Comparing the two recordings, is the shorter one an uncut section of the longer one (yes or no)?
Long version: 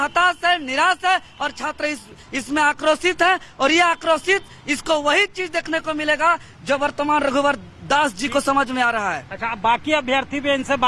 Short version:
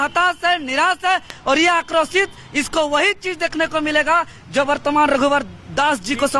no